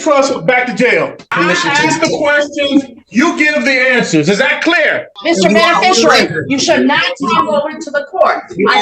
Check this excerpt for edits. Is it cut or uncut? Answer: cut